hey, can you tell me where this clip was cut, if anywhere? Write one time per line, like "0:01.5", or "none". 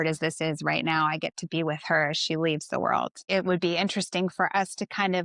0:03.2

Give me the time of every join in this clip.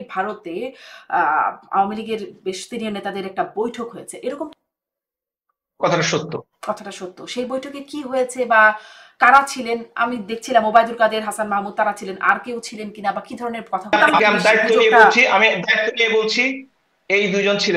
0:04.5
0:13.9

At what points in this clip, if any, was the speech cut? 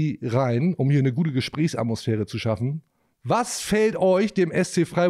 none

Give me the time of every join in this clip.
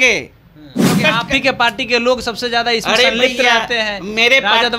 0:00.9

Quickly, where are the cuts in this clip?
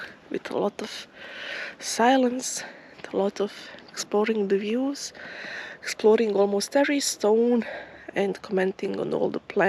none

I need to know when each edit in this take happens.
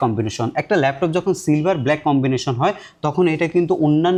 none

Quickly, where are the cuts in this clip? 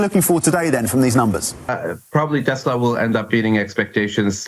0:01.7

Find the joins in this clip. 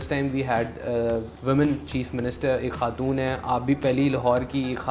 0:01.3

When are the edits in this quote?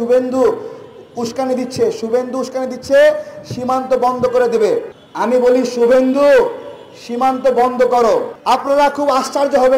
0:05.0
0:08.3

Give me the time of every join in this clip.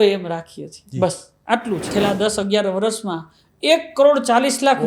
0:01.9

